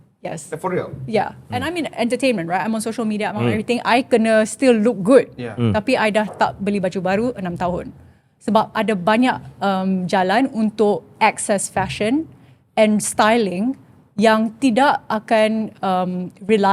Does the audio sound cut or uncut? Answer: uncut